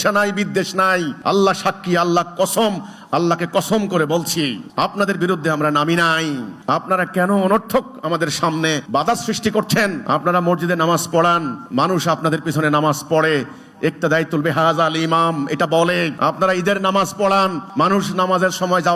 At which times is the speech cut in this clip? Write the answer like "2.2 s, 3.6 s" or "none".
1.1 s, 4.6 s, 6.5 s, 8.8 s, 10.0 s, 11.6 s, 16.1 s, 17.6 s